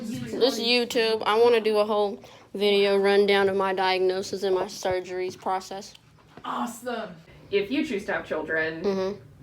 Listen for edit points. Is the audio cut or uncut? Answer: cut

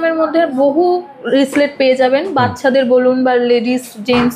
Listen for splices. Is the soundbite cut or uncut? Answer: uncut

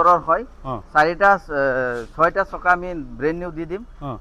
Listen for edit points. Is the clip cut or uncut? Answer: uncut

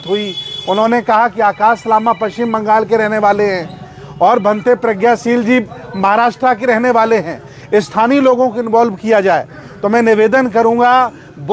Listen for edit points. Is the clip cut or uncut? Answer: uncut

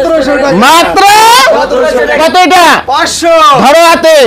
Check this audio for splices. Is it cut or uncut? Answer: cut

